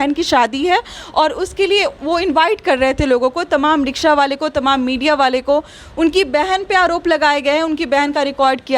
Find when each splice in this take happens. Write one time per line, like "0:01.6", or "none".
none